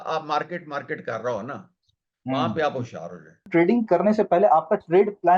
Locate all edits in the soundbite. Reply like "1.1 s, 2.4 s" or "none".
3.5 s